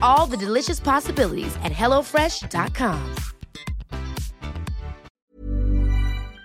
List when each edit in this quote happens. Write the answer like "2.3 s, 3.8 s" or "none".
5.1 s